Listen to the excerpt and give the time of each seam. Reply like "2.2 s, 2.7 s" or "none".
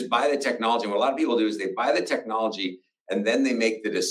none